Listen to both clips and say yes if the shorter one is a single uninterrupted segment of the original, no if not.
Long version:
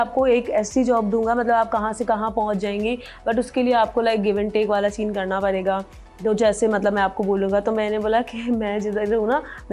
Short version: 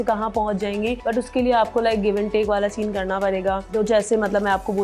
no